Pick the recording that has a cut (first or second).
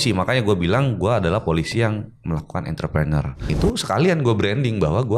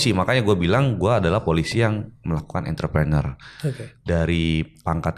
first